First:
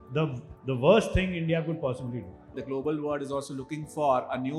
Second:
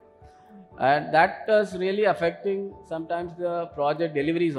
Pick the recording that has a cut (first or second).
first